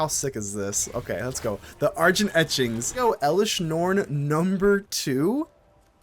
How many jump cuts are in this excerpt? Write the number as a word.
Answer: one